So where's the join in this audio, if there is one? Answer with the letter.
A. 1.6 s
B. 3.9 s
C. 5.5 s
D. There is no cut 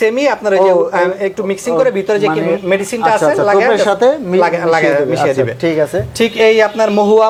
D